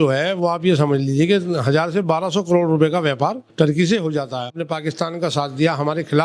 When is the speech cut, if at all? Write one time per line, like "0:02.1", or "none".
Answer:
0:03.4
0:04.6